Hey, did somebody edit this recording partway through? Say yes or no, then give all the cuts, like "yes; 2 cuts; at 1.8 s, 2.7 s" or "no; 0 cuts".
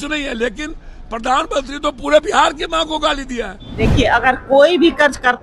yes; 1 cut; at 3.6 s